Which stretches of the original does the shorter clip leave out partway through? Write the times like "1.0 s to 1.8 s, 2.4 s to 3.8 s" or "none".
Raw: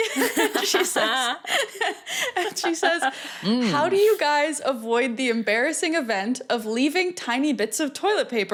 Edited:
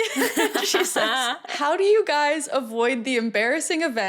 1.6 s to 3.7 s